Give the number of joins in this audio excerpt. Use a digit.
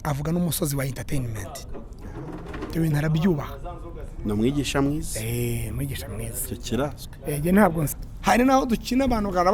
1